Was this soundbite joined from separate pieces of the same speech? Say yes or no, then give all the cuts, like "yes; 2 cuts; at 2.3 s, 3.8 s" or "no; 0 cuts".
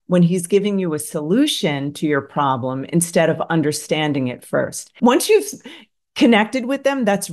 yes; 1 cut; at 4.8 s